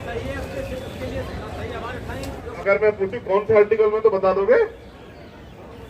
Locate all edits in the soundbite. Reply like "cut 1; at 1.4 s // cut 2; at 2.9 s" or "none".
cut 1; at 2.5 s